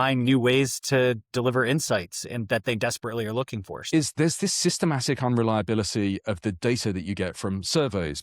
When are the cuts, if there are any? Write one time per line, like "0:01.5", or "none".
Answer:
0:03.9